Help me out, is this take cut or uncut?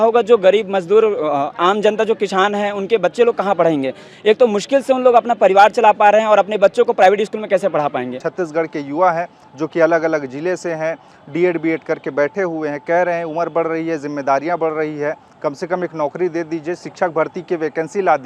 cut